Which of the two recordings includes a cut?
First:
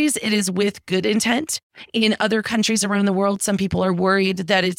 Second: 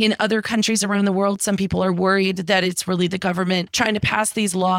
second; 1 cut; at 3.7 s

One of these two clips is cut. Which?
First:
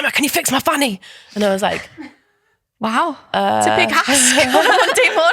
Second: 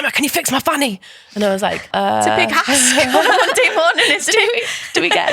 second; 1 cut; at 1.8 s

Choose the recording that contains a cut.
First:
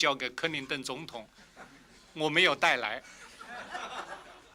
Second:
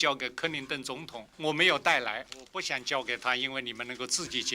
second; 2 cuts; at 1.2 s, 2.4 s

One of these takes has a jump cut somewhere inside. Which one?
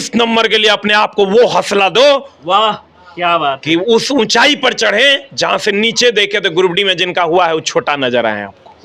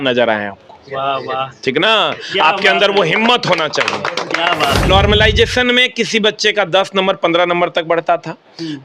second; 1 cut; at 4.9 s

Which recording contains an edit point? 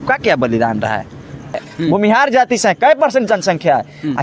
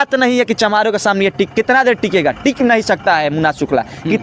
first; 1 cut; at 1.7 s

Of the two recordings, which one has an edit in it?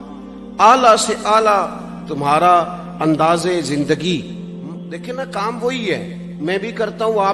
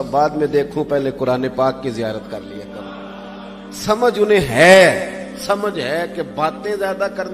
first; 1 cut; at 4.9 s

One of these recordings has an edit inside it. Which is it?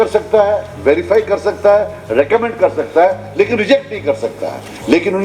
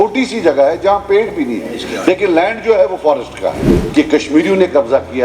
second; 1 cut; at 3.8 s

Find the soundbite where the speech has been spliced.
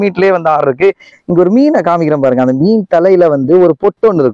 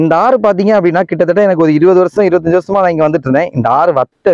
first; 1 cut; at 1.1 s

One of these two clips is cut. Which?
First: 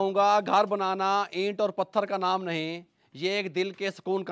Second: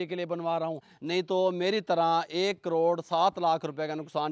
second; 1 cut; at 0.9 s

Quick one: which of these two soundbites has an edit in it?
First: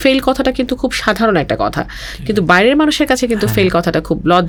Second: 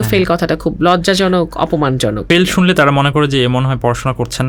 second; 1 cut; at 2.2 s

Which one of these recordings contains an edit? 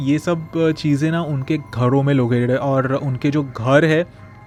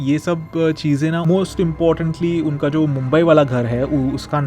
second; 1 cut; at 1.2 s

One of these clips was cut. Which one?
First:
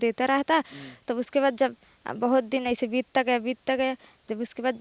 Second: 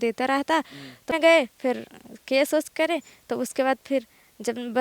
second; 1 cut; at 1.1 s

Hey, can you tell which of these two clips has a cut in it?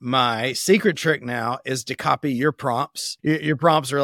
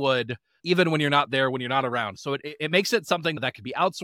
first; 1 cut; at 3.0 s

